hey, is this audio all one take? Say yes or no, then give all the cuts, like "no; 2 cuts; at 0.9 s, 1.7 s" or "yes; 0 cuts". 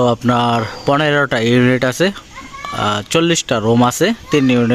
yes; 0 cuts